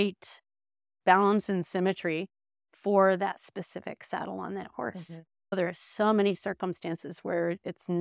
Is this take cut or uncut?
cut